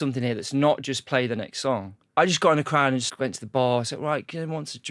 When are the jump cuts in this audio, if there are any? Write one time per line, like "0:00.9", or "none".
0:02.0
0:03.1